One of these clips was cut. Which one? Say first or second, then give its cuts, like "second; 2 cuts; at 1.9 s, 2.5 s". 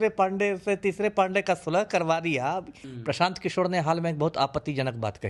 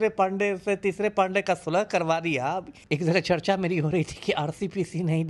second; 1 cut; at 2.8 s